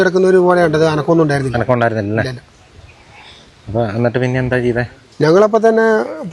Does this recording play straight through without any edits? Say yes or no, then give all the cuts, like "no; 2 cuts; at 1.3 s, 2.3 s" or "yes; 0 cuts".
yes; 0 cuts